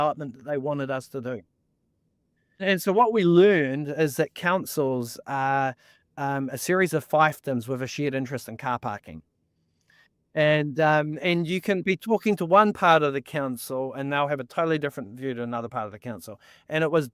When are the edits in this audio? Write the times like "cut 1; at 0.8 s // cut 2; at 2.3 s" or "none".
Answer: cut 1; at 2.6 s